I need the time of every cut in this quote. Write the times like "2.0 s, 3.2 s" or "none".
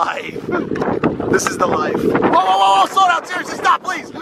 1.0 s